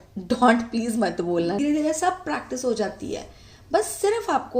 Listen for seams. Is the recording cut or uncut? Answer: cut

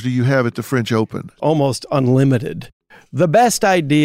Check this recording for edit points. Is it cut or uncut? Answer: cut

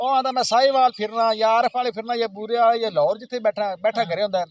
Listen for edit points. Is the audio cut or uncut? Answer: uncut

